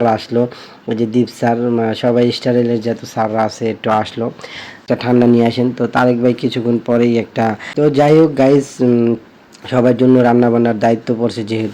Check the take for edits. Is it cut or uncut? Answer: cut